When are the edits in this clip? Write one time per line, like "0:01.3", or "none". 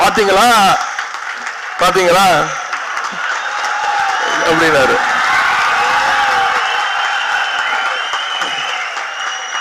none